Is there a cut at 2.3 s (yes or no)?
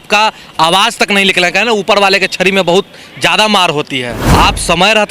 no